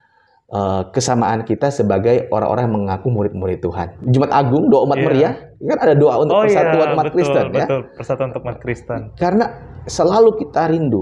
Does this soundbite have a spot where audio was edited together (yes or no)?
yes